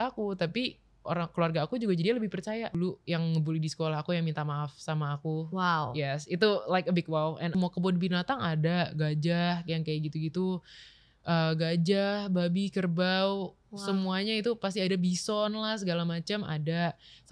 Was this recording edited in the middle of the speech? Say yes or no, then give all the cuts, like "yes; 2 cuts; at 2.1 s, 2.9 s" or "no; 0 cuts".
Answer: yes; 2 cuts; at 2.7 s, 7.5 s